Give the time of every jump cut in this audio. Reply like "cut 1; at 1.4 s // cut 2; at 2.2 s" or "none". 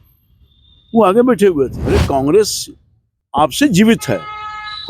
cut 1; at 1.8 s